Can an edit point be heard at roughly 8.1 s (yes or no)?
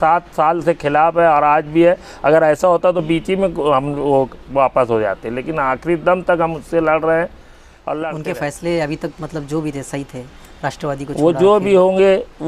yes